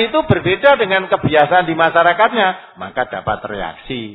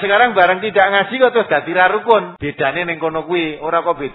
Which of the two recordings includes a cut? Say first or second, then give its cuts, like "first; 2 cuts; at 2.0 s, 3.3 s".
second; 1 cut; at 2.3 s